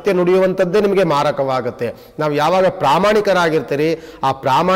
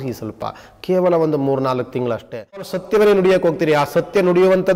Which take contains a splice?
second; 1 cut; at 2.7 s

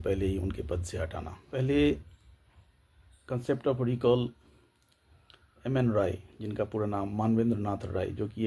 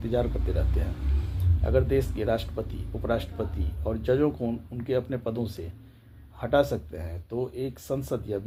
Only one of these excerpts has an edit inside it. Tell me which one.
first; 1 cut; at 1.5 s

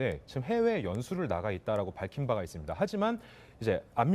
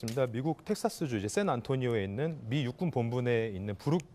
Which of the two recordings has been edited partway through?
second; 1 cut; at 1.0 s

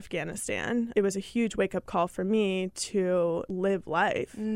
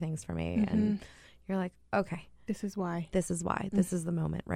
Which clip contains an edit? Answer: first; 2 cuts; at 0.9 s, 3.5 s

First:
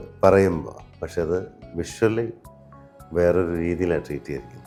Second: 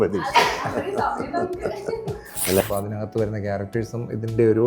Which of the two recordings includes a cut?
second; 1 cut; at 2.6 s

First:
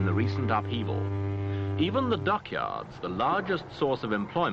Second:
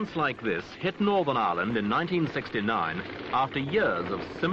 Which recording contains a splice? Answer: second; 1 cut; at 3.5 s

